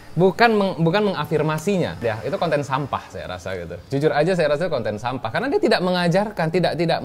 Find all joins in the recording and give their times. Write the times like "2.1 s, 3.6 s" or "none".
2.0 s